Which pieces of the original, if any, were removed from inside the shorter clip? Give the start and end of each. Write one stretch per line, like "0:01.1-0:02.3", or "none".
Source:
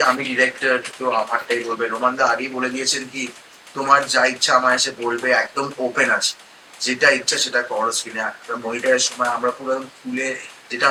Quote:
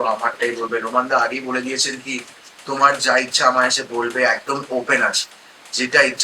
none